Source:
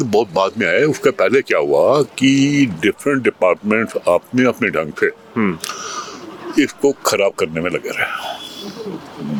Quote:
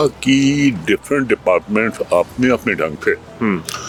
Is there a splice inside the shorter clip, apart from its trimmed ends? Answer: no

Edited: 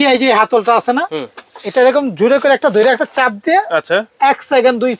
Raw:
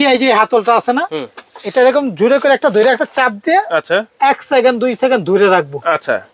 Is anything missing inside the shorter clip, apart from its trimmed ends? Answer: no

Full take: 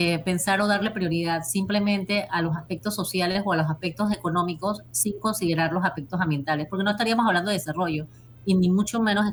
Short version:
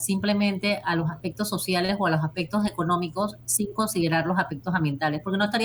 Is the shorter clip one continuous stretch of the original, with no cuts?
yes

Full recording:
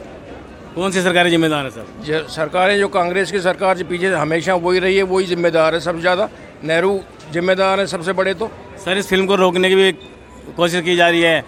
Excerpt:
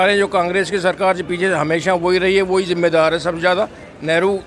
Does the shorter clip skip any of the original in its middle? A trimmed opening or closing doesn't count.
no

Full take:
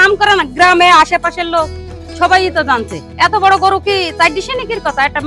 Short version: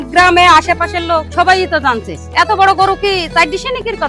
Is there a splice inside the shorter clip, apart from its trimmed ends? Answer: yes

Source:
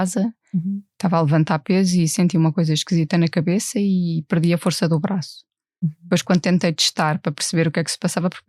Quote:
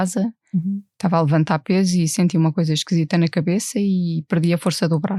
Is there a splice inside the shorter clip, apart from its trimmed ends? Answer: no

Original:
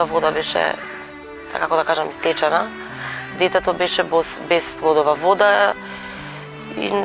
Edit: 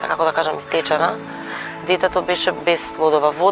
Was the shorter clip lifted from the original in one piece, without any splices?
no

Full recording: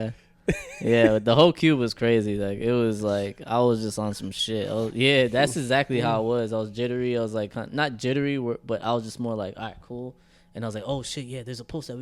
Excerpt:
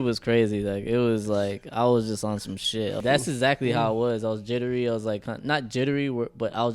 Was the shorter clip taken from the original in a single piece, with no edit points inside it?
no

